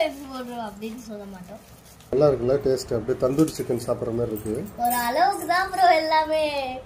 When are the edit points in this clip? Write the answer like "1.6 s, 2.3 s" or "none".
2.1 s

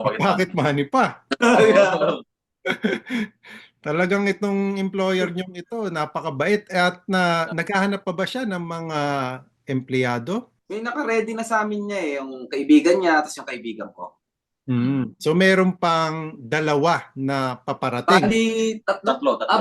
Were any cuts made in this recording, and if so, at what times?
10.6 s

